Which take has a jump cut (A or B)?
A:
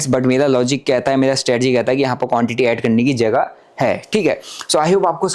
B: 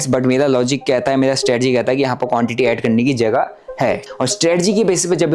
B